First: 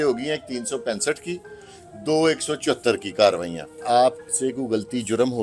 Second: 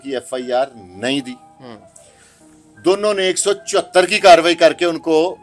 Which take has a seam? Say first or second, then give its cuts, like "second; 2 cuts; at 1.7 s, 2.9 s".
first; 1 cut; at 3.8 s